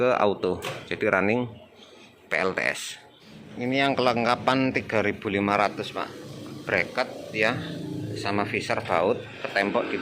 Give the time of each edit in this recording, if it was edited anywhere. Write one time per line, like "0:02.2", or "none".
0:03.2

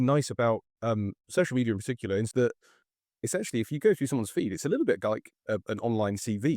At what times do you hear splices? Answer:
0:02.3

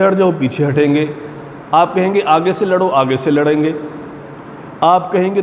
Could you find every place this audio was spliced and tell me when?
none

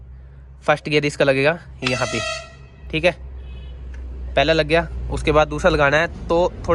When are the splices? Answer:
none

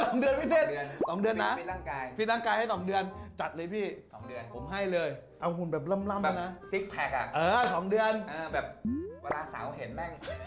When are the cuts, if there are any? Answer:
none

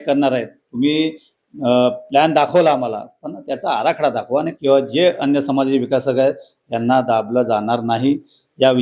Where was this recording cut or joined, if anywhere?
0:04.5

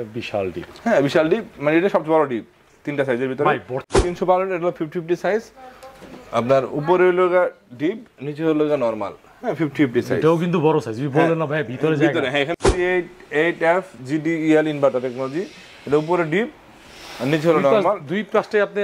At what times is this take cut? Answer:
0:03.8
0:12.5

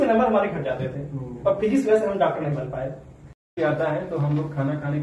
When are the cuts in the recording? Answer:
0:03.5

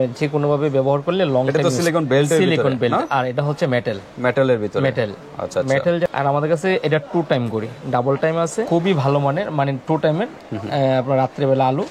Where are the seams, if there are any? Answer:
0:01.6
0:06.1
0:08.7

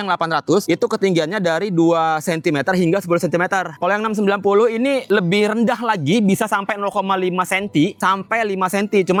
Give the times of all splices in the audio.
none

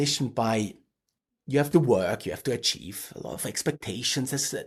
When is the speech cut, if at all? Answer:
none

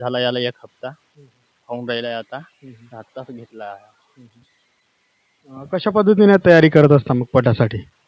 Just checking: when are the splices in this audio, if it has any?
none

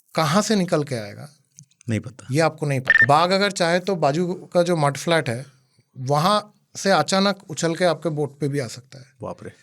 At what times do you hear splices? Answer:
0:03.0

